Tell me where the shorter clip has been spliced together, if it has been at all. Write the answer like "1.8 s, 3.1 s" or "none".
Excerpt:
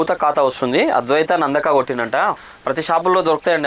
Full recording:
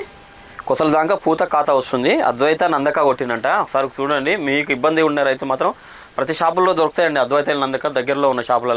2.4 s